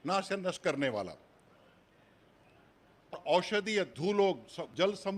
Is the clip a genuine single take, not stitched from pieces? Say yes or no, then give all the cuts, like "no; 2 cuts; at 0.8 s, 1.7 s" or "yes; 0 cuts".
yes; 0 cuts